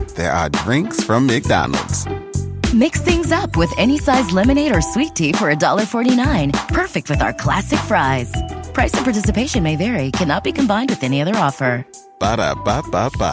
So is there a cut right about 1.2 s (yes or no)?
no